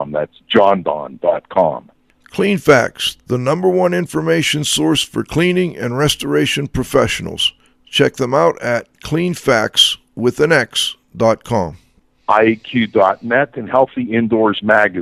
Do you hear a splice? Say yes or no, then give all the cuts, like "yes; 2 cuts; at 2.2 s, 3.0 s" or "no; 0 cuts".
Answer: no; 0 cuts